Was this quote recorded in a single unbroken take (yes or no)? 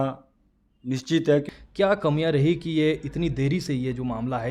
no